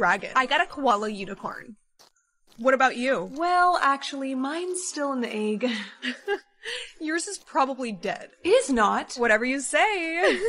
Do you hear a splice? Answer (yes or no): yes